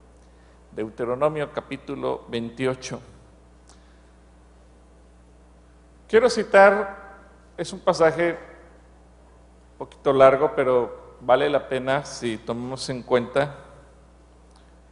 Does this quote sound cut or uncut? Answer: cut